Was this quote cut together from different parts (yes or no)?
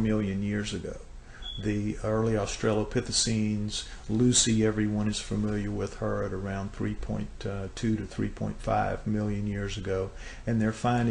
yes